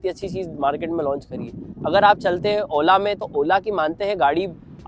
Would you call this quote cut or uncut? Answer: uncut